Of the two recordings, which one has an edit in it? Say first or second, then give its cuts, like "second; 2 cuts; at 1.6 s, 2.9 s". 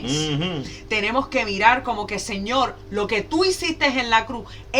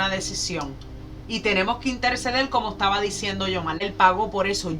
second; 1 cut; at 3.8 s